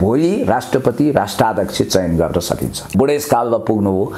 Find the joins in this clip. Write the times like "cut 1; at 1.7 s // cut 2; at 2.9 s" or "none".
cut 1; at 2.9 s